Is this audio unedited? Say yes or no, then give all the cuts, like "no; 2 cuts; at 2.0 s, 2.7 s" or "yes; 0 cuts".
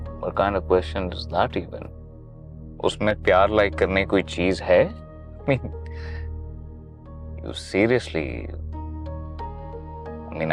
yes; 0 cuts